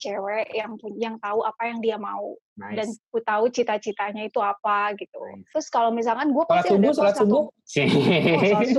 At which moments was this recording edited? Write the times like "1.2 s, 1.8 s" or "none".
5.4 s